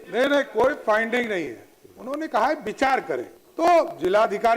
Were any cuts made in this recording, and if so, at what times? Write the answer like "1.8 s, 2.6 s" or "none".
3.4 s

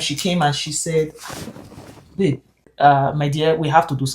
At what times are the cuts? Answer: 2.7 s

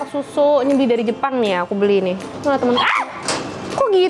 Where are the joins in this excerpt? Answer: 2.3 s

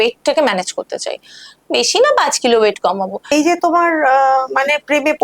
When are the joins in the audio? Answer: 3.2 s

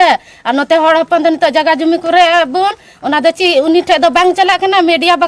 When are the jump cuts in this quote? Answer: none

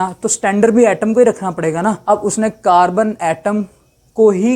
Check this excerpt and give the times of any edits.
2.0 s

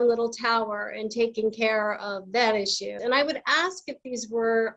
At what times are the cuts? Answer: 3.0 s

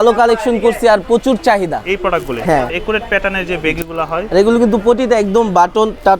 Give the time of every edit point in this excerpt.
2.7 s, 4.3 s

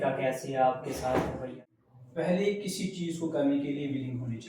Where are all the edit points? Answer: 1.5 s

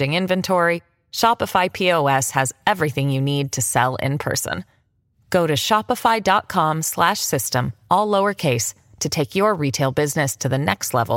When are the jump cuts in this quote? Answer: none

